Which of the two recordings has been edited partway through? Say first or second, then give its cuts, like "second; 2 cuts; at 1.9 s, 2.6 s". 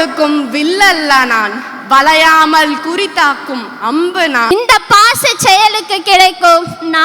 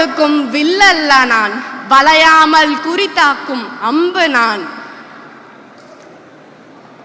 first; 1 cut; at 4.5 s